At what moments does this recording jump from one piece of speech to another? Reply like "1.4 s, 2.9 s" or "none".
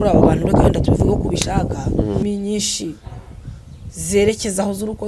2.2 s